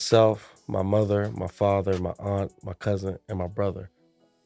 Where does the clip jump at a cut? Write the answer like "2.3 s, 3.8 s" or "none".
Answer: none